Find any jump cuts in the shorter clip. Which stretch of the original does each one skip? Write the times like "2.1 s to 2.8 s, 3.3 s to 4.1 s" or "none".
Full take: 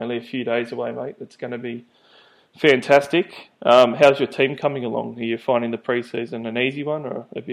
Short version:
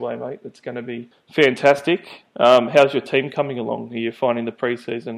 1.9 s to 2.4 s